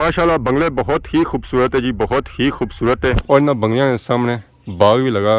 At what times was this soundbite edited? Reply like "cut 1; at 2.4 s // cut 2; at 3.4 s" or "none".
cut 1; at 3.2 s